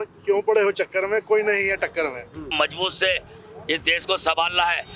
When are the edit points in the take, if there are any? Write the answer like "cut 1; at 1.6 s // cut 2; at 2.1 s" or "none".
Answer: cut 1; at 2.5 s

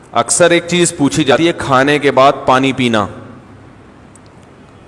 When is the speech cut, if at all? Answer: cut 1; at 1.3 s

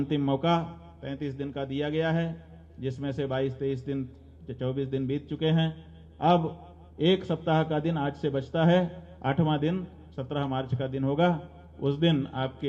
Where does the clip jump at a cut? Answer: none

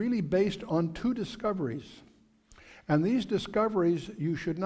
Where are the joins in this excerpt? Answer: none

